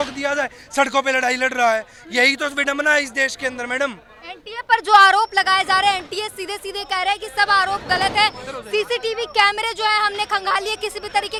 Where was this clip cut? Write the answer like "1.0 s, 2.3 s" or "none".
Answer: none